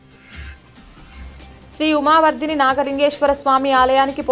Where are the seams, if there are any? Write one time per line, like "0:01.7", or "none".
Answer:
0:00.9